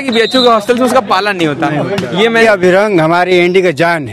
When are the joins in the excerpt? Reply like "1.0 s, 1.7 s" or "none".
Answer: 2.4 s